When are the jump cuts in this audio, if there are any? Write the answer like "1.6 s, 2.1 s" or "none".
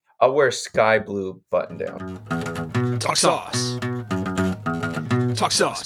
2.3 s